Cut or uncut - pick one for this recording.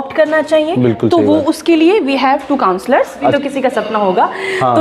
cut